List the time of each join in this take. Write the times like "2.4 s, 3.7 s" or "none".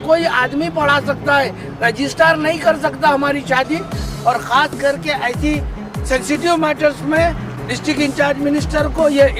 4.0 s